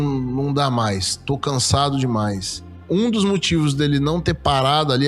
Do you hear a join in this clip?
yes; 1 cut; at 2.8 s

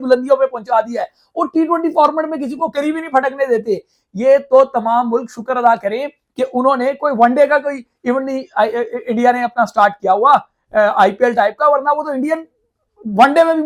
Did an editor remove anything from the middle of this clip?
no; 0 cuts

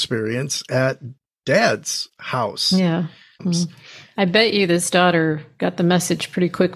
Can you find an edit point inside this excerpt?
yes; 1 cut; at 3.5 s

